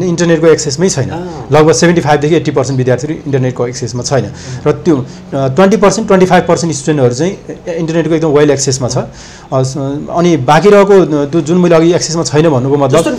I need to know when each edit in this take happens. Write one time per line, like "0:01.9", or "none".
none